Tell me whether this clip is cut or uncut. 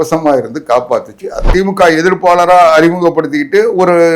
cut